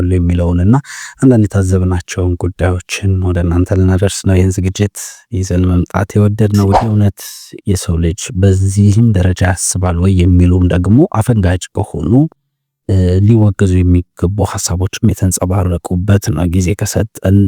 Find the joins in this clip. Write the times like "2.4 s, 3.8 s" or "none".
6.8 s

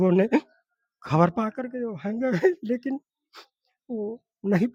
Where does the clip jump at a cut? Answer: none

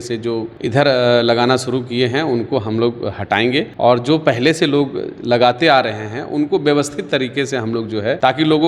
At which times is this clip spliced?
none

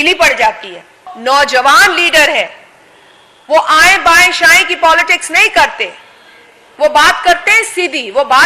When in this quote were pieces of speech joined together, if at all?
1.1 s

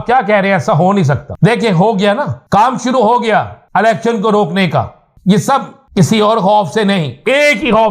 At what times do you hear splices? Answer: 1.3 s, 2.4 s, 3.6 s, 5.0 s, 5.8 s

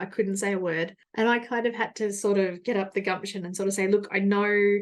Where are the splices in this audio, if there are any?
1.0 s

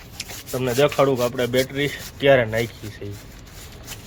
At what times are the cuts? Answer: none

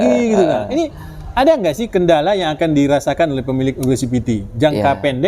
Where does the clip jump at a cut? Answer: none

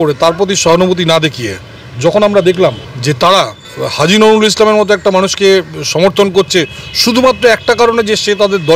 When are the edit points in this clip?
2.9 s, 3.6 s

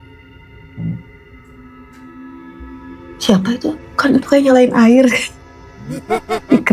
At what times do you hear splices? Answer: 3.8 s

